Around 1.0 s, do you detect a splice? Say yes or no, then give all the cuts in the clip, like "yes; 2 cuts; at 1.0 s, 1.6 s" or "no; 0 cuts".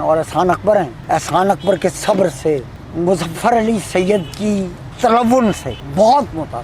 yes; 4 cuts; at 1.0 s, 2.8 s, 4.9 s, 5.7 s